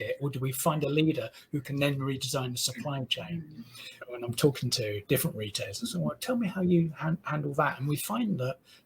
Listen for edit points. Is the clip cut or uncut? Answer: cut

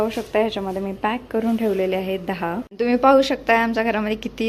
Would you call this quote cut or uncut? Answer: cut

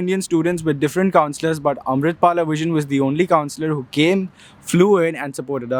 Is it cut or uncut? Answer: uncut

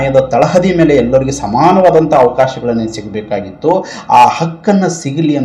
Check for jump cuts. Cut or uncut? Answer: uncut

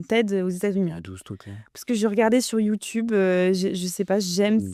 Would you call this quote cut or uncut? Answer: uncut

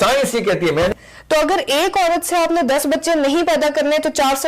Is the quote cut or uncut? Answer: cut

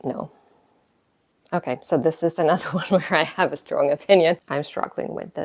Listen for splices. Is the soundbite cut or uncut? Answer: cut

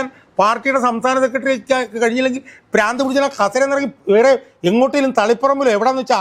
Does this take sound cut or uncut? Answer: uncut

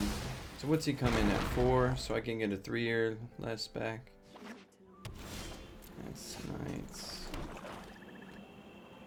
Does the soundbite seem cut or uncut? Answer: uncut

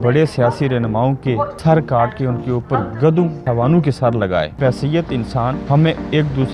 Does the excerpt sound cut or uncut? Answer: cut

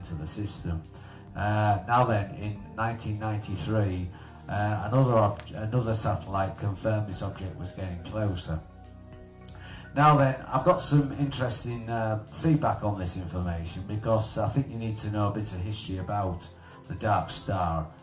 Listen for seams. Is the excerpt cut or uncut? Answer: cut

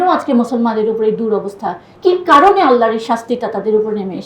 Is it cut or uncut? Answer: cut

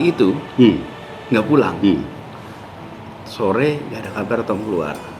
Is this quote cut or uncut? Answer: uncut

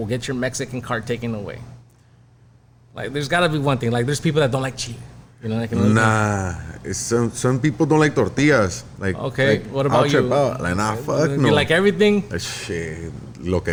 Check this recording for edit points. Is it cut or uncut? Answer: uncut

